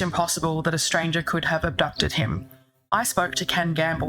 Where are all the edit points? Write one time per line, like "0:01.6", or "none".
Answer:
0:02.8